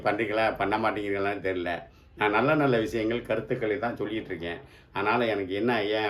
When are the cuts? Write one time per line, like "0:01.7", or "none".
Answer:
none